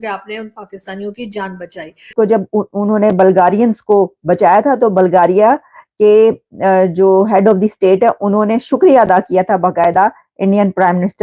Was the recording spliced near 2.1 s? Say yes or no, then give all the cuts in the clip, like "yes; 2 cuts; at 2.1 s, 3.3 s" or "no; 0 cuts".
yes; 1 cut; at 2.1 s